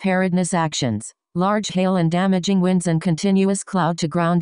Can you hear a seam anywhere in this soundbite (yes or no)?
yes